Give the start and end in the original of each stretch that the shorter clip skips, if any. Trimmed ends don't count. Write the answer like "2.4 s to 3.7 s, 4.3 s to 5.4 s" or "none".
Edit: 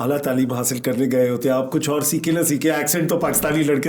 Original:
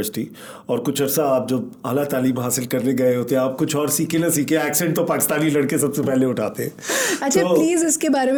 none